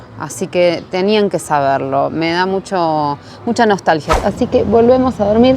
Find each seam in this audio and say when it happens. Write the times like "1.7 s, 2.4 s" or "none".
4.1 s